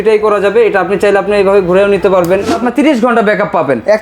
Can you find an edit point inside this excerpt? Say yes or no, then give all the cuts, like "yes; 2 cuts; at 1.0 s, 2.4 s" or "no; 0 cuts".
yes; 1 cut; at 2.5 s